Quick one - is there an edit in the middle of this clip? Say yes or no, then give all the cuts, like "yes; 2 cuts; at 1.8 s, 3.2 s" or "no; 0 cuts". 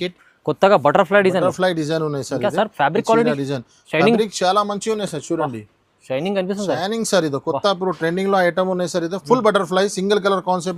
no; 0 cuts